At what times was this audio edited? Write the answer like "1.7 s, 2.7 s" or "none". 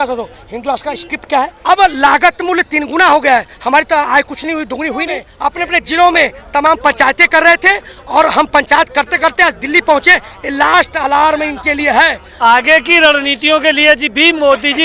1.6 s, 5.3 s, 12.2 s